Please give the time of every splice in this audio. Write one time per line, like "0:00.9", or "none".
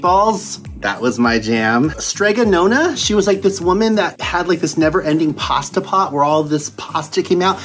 0:02.0
0:04.2